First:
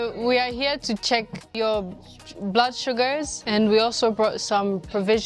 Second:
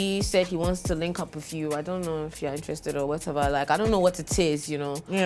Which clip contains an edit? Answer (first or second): first